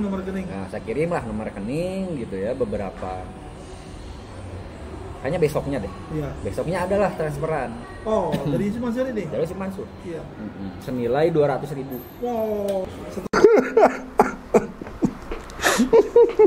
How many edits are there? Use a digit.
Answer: 1